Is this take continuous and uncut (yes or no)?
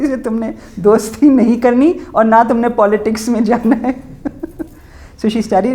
yes